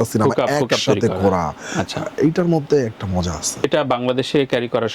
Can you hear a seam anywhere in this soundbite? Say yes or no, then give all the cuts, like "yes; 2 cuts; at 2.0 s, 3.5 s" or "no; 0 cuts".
no; 0 cuts